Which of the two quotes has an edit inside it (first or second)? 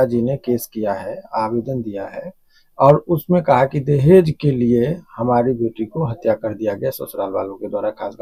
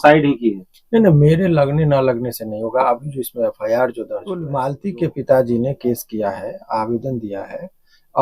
second